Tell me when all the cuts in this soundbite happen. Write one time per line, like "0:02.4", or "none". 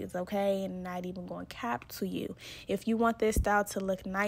none